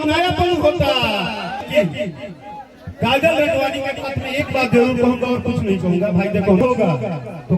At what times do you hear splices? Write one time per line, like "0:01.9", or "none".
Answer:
0:01.6
0:06.6